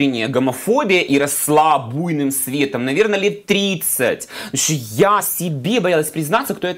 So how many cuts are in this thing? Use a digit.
0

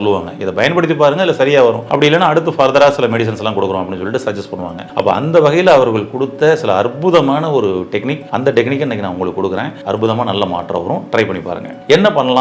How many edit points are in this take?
0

